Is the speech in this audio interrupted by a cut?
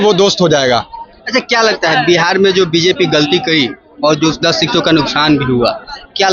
no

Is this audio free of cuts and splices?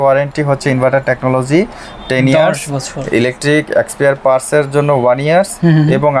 yes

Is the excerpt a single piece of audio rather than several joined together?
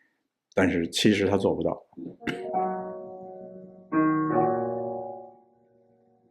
no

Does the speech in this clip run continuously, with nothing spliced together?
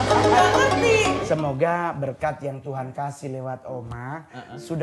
no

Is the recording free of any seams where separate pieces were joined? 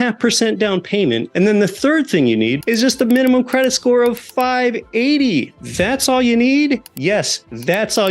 no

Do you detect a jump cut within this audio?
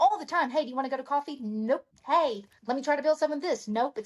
no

